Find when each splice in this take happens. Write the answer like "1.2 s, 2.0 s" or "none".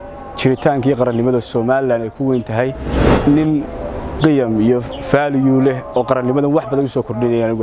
3.0 s